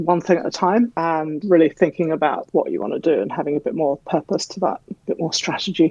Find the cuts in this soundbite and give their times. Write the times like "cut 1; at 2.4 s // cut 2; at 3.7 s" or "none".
cut 1; at 1.0 s // cut 2; at 2.4 s